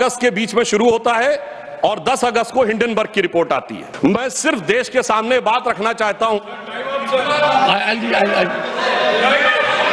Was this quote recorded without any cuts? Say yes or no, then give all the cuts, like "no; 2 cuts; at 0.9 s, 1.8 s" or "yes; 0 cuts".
no; 1 cut; at 3.8 s